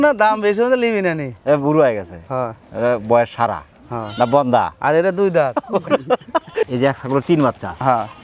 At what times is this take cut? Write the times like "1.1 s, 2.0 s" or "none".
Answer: 6.6 s